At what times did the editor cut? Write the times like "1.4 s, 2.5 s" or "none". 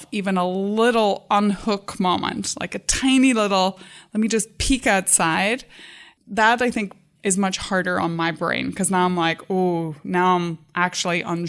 7.0 s